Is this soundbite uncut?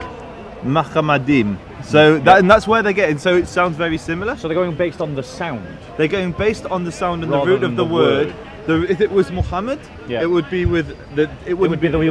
yes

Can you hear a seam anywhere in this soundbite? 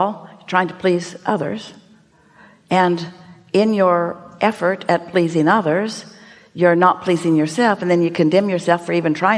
no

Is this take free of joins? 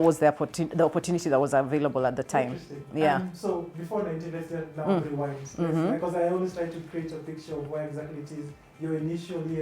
yes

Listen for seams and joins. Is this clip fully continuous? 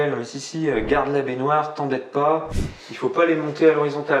no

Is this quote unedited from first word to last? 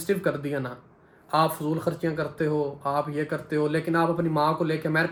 yes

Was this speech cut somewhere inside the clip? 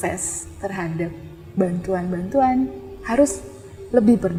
no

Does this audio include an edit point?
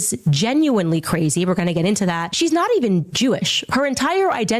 yes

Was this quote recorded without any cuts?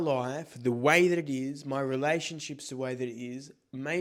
yes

